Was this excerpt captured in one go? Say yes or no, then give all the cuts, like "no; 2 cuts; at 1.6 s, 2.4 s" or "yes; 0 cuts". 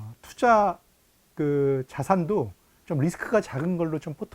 yes; 0 cuts